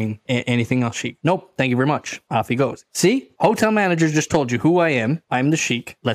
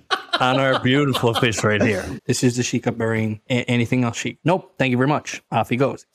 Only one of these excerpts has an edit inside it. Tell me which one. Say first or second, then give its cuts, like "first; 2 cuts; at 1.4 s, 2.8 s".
second; 1 cut; at 2.2 s